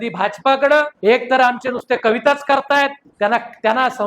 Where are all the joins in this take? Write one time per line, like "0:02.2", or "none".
0:00.9
0:03.0

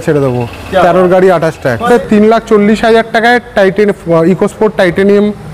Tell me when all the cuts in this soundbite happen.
0:01.9

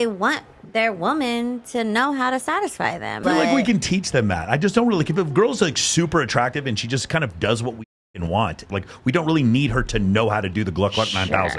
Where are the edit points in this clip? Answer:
0:03.2
0:06.5
0:08.6

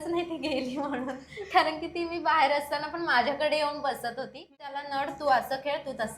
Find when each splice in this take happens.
0:04.8

